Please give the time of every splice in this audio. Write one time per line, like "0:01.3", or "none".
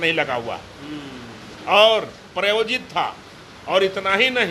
none